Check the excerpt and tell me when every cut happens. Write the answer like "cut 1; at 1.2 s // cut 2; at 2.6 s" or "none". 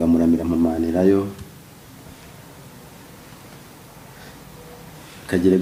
none